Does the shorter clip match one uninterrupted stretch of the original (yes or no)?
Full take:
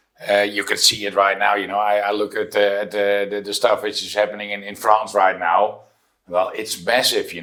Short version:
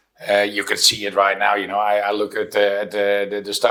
yes